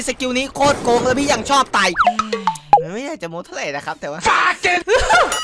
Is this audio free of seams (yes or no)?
yes